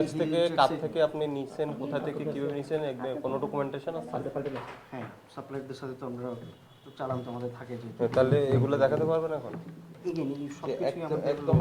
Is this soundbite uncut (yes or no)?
yes